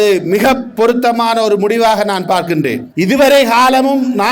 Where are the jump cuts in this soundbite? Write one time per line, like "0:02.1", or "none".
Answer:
0:02.9